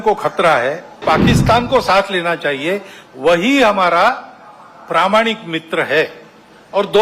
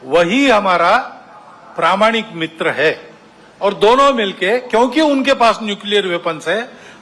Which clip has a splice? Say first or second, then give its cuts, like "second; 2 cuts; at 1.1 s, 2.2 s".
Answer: first; 1 cut; at 1.0 s